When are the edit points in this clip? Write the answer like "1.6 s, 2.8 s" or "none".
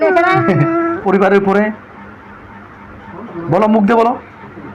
1.0 s